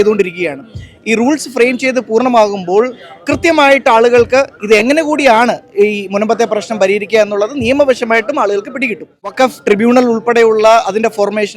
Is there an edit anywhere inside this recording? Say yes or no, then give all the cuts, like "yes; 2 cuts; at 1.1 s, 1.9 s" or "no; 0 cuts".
yes; 1 cut; at 9.3 s